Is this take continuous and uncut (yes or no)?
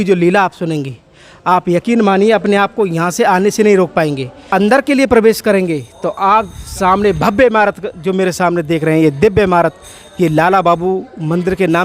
no